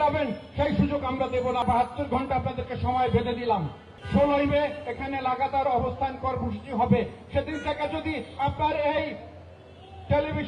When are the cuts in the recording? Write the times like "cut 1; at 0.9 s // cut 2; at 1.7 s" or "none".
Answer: cut 1; at 1.6 s // cut 2; at 3.9 s